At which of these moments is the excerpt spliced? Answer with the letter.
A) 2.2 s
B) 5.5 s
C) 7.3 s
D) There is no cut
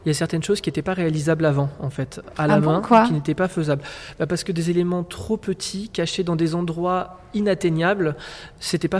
D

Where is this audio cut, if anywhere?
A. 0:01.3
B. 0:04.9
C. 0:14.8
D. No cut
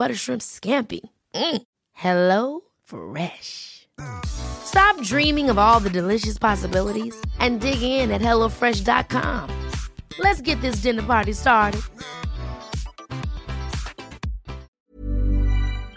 C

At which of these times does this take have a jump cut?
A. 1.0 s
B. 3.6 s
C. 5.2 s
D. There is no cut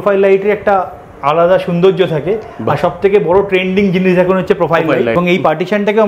C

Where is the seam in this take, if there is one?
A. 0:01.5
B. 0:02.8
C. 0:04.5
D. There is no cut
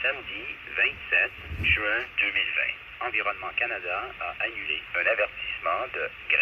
B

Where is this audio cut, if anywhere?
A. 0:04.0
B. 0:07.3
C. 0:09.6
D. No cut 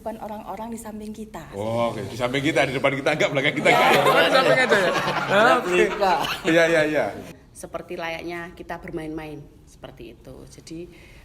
B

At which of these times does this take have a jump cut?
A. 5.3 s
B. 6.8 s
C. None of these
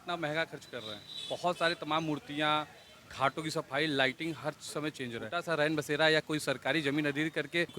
A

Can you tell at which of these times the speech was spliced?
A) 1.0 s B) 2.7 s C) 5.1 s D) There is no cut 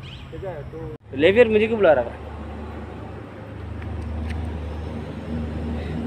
A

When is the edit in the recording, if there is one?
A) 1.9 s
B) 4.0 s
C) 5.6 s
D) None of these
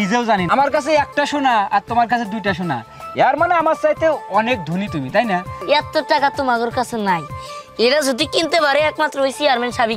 C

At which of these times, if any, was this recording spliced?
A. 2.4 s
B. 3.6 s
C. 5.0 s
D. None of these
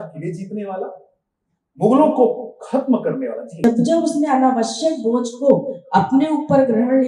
B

